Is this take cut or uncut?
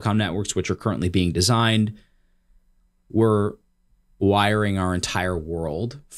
uncut